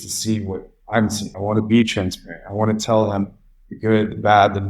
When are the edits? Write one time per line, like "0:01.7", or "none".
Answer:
0:01.3